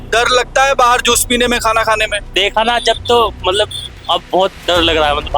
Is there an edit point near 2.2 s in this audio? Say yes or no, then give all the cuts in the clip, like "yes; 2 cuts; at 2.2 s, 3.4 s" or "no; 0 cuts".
yes; 1 cut; at 2.2 s